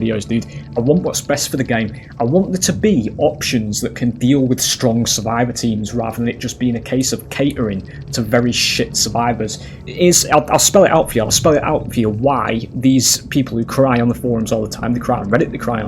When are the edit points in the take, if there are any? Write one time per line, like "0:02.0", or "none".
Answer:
0:09.8